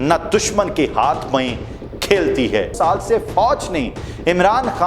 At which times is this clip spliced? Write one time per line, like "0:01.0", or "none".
0:02.7